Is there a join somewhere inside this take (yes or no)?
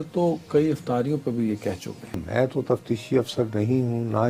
yes